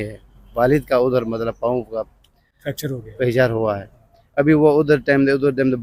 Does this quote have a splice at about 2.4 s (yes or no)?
no